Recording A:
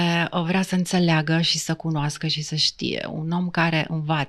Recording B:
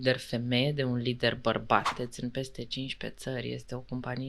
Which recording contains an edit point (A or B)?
B